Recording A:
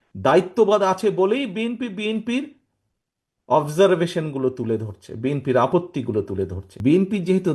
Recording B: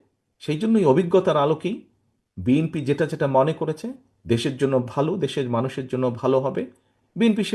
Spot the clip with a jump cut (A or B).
A